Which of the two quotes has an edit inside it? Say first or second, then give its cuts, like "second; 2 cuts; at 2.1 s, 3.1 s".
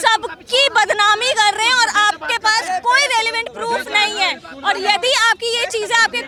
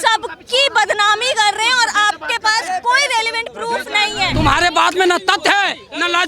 second; 1 cut; at 4.3 s